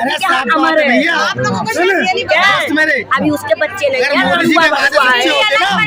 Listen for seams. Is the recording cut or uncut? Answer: uncut